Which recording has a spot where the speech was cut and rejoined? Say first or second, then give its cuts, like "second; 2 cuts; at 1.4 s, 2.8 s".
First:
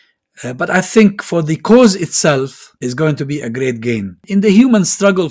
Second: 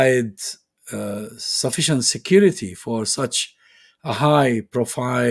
first; 2 cuts; at 2.6 s, 4.2 s